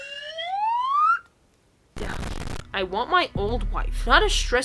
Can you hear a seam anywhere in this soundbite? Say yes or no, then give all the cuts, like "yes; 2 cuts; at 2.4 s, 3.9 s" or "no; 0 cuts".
yes; 1 cut; at 2.4 s